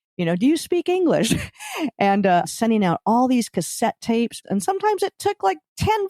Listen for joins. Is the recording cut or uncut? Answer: cut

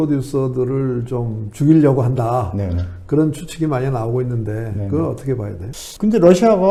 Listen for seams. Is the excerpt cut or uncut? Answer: uncut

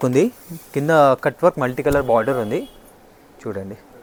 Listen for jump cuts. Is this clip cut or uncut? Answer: uncut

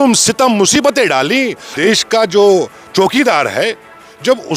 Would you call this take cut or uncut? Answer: cut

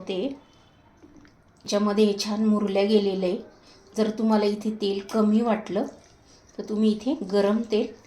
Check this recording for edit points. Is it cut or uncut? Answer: uncut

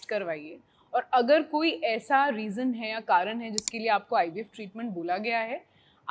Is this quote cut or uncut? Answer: uncut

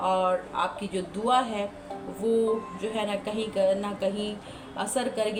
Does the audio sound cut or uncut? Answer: uncut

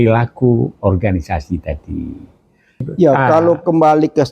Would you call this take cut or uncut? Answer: cut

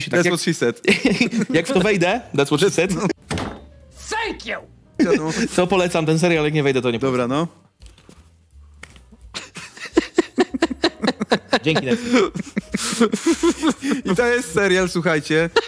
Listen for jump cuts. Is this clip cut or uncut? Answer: uncut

